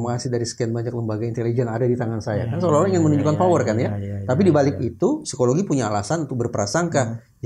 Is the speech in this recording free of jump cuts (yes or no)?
yes